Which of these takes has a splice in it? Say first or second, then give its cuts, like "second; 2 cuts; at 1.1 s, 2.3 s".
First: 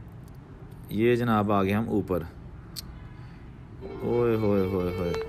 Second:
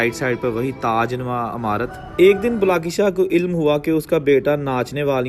second; 1 cut; at 2.0 s